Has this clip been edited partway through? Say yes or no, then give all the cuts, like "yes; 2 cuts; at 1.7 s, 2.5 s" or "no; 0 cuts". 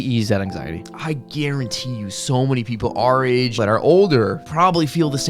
yes; 3 cuts; at 0.9 s, 3.6 s, 4.4 s